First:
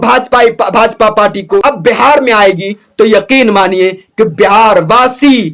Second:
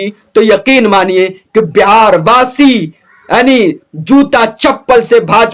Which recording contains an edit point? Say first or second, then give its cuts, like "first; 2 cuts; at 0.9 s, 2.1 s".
first; 1 cut; at 1.6 s